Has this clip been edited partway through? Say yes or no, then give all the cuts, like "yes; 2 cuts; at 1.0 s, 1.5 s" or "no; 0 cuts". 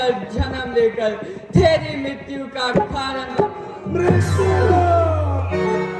no; 0 cuts